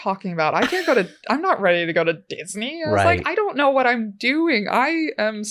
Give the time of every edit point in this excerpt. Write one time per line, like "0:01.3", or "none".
none